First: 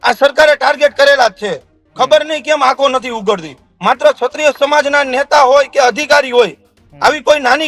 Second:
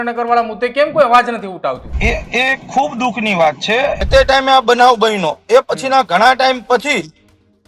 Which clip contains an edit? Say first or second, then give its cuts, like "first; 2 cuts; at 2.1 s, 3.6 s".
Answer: second; 2 cuts; at 1.9 s, 4.0 s